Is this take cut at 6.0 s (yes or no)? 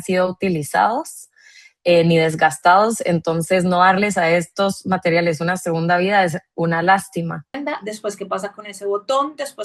no